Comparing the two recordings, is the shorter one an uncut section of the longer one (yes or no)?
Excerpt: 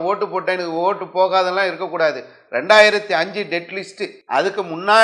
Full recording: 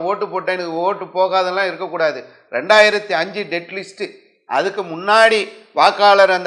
no